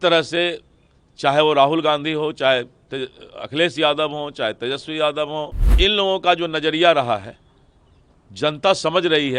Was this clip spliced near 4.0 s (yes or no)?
no